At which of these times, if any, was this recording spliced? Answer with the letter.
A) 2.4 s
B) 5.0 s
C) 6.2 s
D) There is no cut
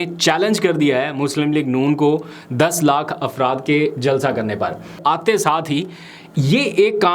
B